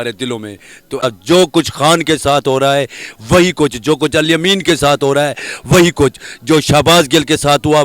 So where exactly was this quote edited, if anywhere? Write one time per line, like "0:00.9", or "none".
0:01.0